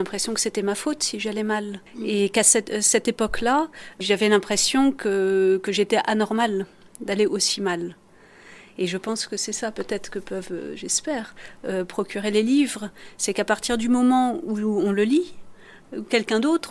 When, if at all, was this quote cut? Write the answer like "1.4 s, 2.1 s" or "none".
1.8 s, 4.0 s